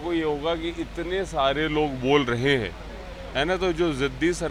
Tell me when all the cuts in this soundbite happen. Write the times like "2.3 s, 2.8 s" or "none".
none